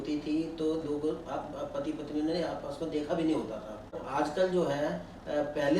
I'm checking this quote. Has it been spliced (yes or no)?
yes